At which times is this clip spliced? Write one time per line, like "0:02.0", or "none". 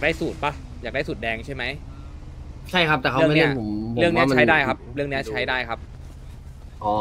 none